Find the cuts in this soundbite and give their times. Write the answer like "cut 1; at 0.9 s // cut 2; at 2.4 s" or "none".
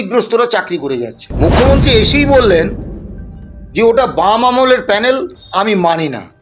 cut 1; at 1.2 s